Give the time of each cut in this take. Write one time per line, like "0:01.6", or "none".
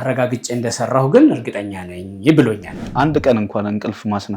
0:02.8